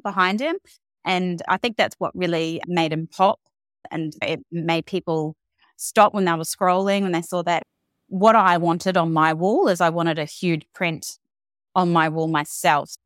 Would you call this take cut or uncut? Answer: cut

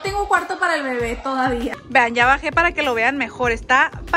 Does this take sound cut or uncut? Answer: cut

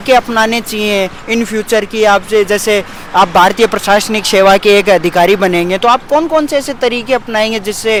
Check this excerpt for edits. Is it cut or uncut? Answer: uncut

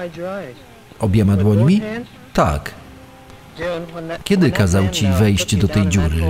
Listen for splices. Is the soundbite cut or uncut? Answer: cut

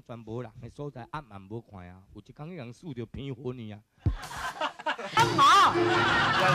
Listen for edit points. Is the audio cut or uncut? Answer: cut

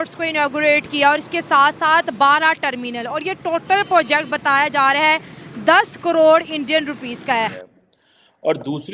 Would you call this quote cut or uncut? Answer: cut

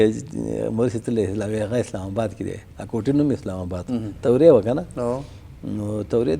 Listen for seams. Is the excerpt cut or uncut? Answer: uncut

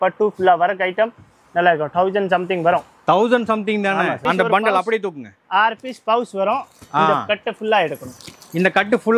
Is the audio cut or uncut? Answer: cut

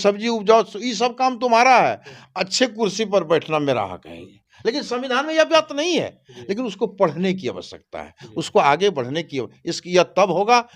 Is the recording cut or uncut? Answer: uncut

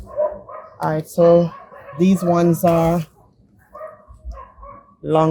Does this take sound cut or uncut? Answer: uncut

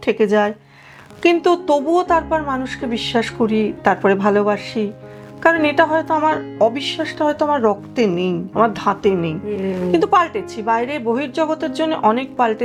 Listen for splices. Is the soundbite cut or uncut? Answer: uncut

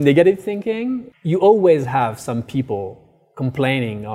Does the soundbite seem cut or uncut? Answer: cut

